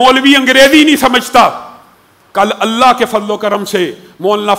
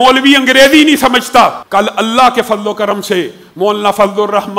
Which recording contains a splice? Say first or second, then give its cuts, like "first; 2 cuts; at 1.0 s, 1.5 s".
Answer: second; 1 cut; at 1.6 s